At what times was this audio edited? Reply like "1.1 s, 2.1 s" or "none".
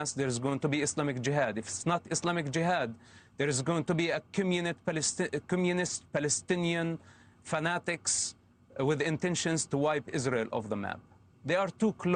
none